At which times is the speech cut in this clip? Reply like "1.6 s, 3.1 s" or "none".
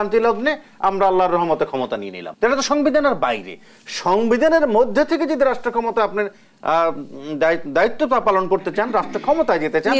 2.2 s